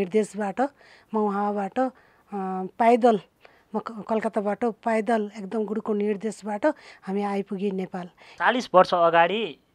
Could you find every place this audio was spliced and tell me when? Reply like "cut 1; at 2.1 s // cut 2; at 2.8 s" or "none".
cut 1; at 8.2 s